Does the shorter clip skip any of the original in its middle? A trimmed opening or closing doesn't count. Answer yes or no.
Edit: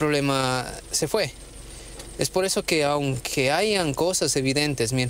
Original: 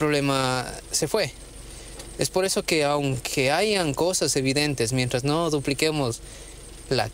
no